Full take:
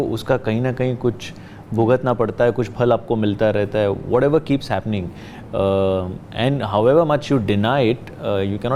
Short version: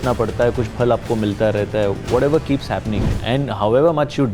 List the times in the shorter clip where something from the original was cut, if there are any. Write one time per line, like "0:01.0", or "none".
0:03.1